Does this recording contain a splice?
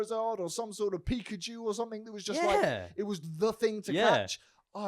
no; 0 cuts

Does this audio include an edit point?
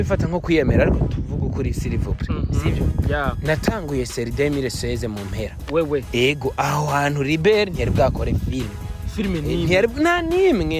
no; 0 cuts

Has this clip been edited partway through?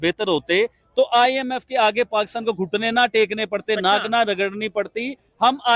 no; 0 cuts

